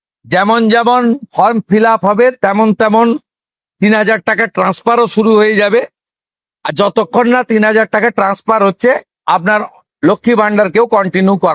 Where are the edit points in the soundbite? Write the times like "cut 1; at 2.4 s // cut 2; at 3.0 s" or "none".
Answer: cut 1; at 9.1 s